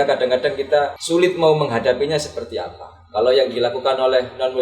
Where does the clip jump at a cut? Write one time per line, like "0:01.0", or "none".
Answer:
0:01.0